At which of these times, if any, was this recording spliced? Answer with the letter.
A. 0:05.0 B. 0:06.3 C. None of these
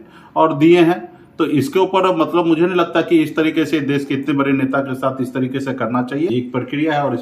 B